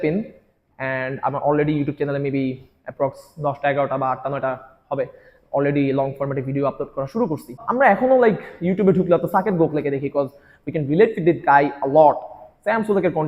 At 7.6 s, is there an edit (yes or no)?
yes